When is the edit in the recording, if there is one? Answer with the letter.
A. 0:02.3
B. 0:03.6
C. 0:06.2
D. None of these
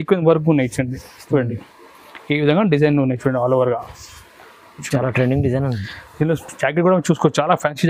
D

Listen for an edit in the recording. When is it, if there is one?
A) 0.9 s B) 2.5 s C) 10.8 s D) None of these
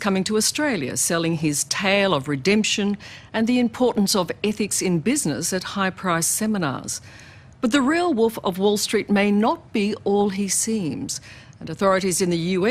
C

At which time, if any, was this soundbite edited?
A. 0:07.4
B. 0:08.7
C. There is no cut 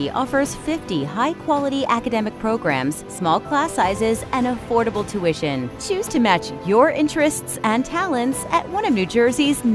C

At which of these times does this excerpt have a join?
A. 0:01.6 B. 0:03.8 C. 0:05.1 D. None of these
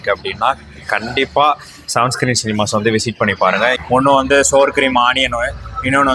B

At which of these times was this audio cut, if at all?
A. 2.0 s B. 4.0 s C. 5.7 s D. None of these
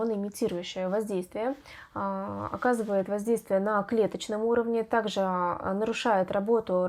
D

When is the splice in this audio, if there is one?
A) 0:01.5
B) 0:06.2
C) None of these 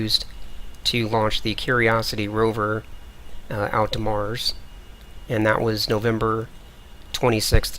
A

